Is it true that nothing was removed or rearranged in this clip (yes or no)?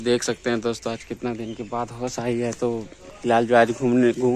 yes